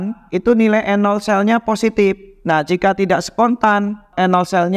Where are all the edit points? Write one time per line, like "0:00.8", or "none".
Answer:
0:02.3